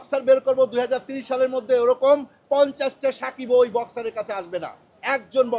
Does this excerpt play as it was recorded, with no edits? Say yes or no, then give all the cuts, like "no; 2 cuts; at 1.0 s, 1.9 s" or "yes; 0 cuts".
yes; 0 cuts